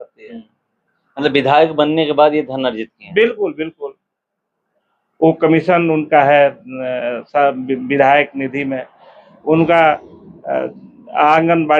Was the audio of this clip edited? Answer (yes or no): no